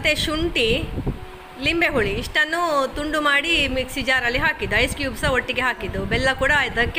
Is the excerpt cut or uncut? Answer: uncut